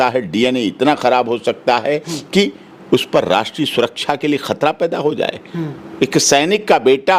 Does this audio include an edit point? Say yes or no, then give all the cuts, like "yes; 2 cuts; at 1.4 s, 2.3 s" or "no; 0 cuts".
no; 0 cuts